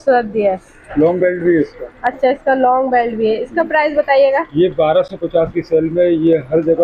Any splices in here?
no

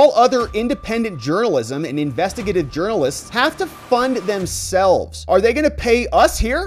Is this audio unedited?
yes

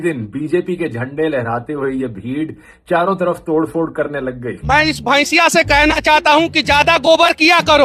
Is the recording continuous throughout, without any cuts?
no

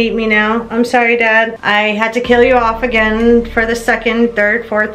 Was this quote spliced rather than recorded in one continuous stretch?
no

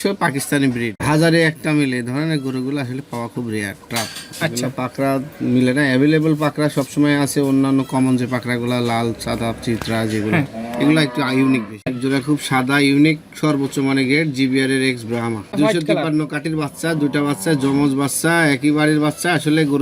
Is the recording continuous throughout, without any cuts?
no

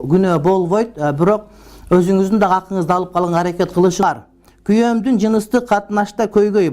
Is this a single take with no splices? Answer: no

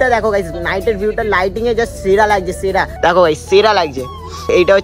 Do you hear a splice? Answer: yes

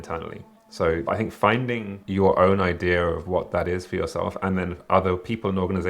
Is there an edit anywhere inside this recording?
yes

